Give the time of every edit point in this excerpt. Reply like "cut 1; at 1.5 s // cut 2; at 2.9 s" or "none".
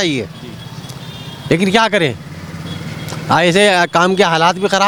none